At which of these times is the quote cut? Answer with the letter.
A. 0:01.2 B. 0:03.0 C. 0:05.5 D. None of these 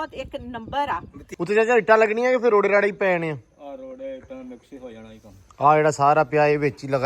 A